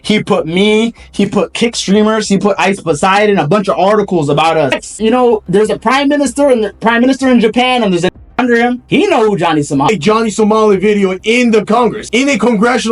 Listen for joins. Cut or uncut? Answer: cut